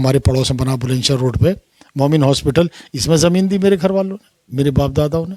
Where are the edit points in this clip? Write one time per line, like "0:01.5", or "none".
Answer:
none